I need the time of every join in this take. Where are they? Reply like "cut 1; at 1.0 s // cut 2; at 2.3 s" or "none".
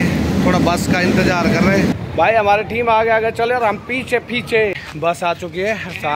cut 1; at 1.9 s // cut 2; at 4.8 s